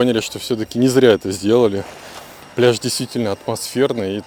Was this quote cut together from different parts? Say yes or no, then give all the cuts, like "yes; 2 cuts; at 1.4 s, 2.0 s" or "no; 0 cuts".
no; 0 cuts